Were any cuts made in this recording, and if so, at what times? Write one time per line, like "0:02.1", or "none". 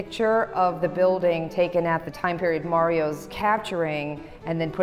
0:02.1
0:03.3